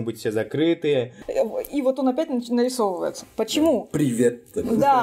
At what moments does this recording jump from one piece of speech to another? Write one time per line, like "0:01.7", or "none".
0:01.2